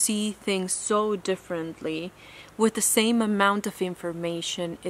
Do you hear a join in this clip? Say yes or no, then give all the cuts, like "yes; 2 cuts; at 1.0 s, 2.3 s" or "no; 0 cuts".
no; 0 cuts